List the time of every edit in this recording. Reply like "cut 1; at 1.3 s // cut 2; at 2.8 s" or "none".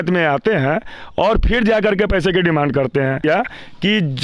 cut 1; at 3.2 s